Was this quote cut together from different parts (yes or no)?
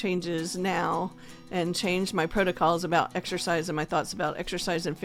no